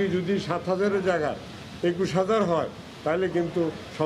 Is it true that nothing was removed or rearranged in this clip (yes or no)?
yes